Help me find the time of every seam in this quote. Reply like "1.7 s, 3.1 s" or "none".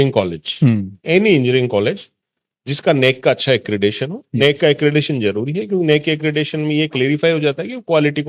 none